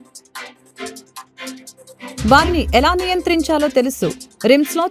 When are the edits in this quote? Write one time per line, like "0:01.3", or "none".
none